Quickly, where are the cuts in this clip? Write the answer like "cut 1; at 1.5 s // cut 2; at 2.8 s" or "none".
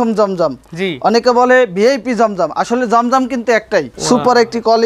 cut 1; at 3.9 s